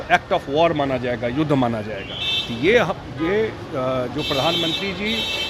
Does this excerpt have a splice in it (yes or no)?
no